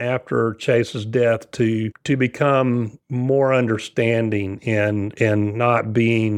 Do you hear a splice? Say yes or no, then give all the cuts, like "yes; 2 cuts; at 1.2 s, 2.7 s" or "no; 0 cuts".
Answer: no; 0 cuts